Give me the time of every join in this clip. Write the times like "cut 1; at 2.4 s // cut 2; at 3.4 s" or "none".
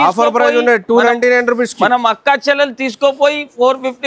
none